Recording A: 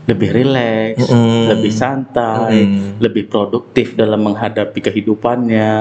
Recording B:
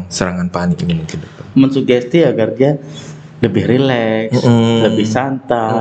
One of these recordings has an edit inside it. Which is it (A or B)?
B